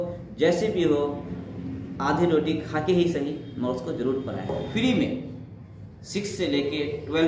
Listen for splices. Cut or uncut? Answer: cut